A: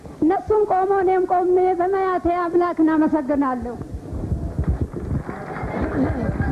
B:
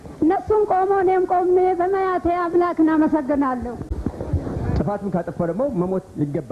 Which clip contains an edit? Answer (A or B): B